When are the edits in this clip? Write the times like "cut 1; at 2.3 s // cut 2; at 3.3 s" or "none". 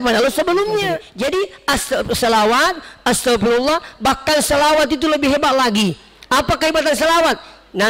cut 1; at 1.1 s